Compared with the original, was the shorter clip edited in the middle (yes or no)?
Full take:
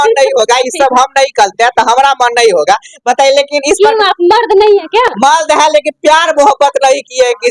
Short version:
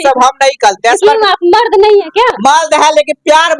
yes